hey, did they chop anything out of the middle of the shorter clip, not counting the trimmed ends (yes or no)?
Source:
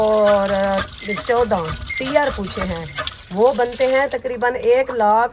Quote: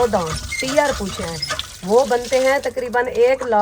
yes